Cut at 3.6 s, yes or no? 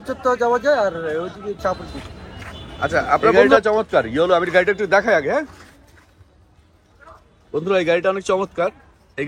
yes